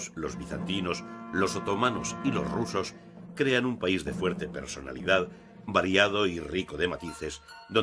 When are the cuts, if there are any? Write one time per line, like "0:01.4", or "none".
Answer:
0:05.6

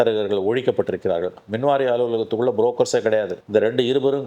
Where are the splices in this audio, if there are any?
0:03.4

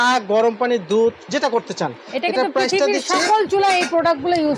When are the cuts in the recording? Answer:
none

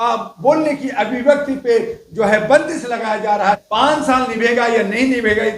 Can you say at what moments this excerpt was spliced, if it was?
0:03.6

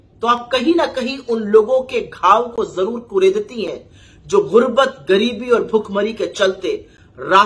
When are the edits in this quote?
none

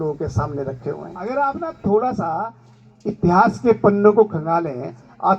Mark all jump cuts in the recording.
0:01.3

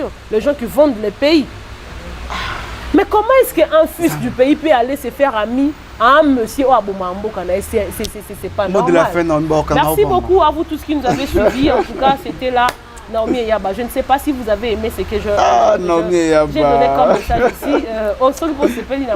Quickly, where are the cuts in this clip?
none

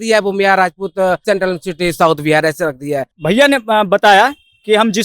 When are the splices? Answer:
0:01.2
0:03.1

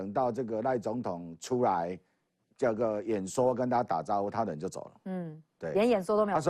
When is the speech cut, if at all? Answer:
none

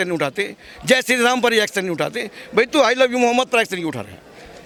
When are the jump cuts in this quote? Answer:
none

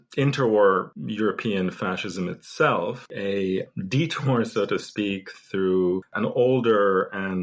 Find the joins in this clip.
0:00.9
0:03.1
0:06.1

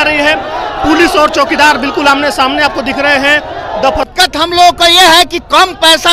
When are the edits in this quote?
0:04.1

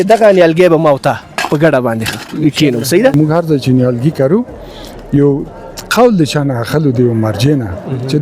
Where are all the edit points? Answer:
0:03.1

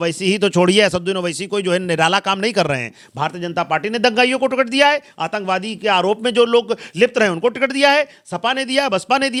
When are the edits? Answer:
none

